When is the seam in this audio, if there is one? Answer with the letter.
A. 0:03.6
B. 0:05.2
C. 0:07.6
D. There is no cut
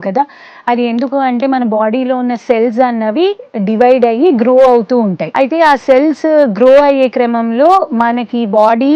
B